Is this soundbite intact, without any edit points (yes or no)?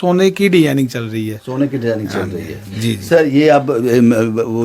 yes